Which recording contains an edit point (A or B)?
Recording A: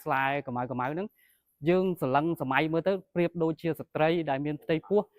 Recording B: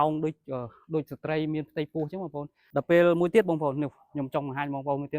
B